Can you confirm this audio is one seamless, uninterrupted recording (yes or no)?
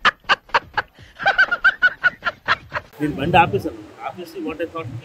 no